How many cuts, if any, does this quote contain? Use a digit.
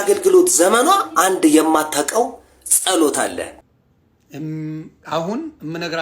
1